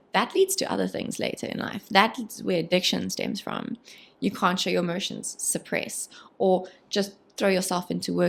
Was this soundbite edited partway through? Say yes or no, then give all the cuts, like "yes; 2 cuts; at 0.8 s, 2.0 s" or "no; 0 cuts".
no; 0 cuts